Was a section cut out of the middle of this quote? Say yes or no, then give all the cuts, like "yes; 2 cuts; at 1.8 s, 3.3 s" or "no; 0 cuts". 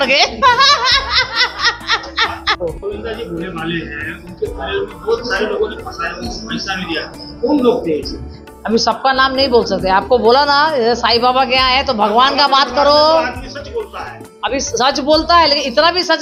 no; 0 cuts